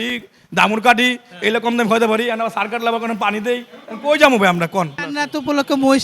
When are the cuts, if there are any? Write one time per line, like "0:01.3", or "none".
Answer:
0:05.1